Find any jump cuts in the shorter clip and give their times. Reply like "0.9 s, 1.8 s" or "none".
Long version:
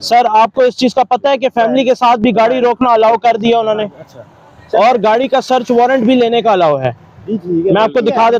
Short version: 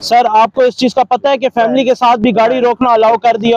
none